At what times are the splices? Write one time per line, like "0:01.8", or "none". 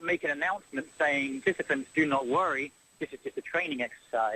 0:01.4

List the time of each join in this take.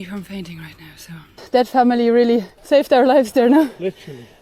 0:01.3
0:02.5

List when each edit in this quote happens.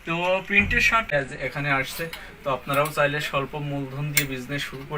0:01.1

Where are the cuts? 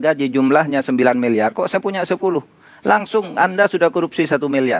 none

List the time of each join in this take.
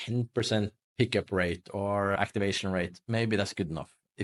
none

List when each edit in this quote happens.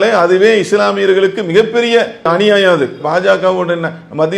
0:02.3

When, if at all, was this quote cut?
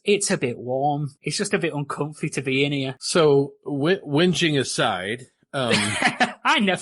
0:01.2
0:03.0

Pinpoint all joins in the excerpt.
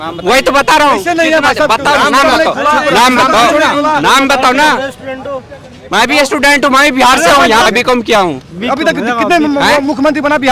0:07.7

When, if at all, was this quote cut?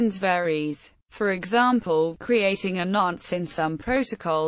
0:02.2

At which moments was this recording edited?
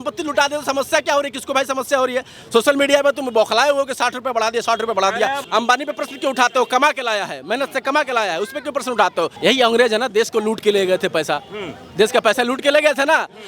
0:05.4
0:09.3

